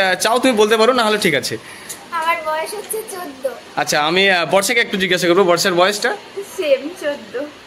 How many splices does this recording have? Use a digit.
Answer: 0